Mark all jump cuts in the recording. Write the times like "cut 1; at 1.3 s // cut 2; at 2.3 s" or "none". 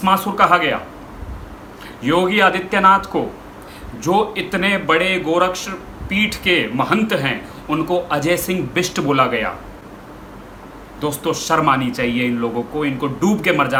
none